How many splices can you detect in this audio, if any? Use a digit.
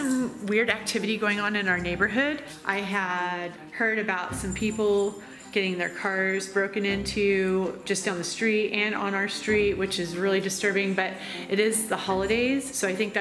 0